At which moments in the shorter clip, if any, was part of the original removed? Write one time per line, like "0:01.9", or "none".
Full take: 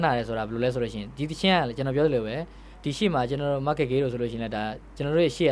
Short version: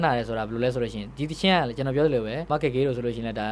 0:02.5